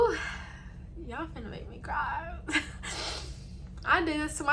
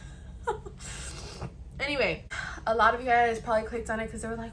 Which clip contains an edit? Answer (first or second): second